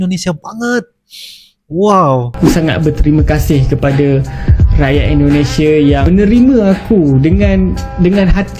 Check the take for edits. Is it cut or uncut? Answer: cut